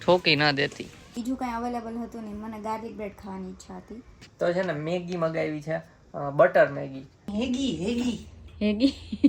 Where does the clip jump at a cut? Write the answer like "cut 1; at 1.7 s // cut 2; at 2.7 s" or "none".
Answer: cut 1; at 1.1 s // cut 2; at 4.2 s // cut 3; at 7.2 s